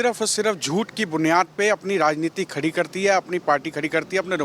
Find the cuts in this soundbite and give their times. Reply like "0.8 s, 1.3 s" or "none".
none